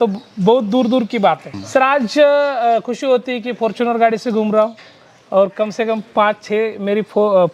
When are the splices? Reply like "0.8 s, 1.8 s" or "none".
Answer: 1.5 s